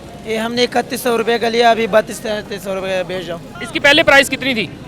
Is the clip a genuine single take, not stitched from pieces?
no; 1 cut; at 3.5 s

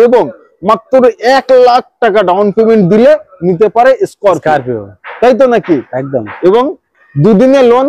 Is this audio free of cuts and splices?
yes; 0 cuts

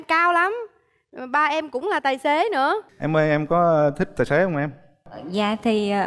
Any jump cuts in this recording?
yes; 1 cut; at 2.9 s

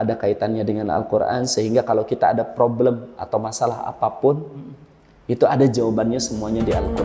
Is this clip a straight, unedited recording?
yes; 0 cuts

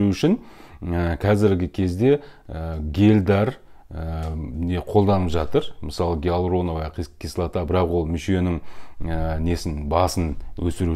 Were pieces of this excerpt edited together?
no; 0 cuts

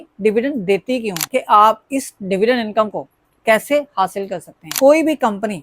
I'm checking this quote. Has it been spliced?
yes; 2 cuts; at 1.2 s, 4.6 s

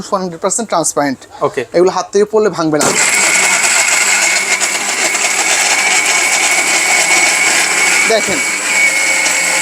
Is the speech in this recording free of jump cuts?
yes; 0 cuts

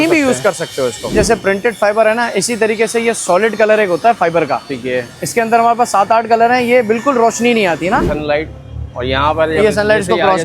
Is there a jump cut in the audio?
yes; 2 cuts; at 1.1 s, 8.0 s

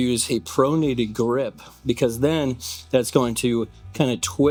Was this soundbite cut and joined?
no; 0 cuts

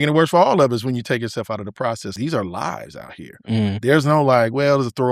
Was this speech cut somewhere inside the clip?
yes; 1 cut; at 2.1 s

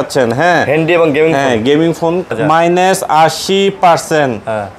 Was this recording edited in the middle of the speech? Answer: yes; 1 cut; at 2.3 s

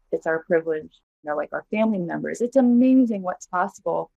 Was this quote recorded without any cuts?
no; 1 cut; at 1.2 s

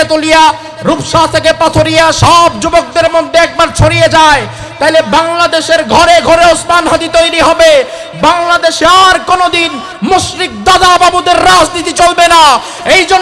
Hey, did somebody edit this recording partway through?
no; 0 cuts

